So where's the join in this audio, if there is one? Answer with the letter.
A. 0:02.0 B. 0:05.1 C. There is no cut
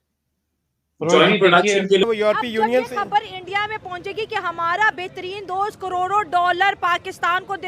A